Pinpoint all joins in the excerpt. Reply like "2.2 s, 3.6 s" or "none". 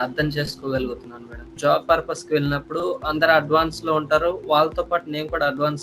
1.5 s